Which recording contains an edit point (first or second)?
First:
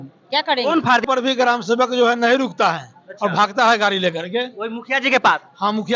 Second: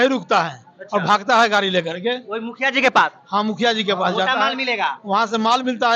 first